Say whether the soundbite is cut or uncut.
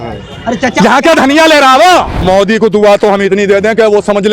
cut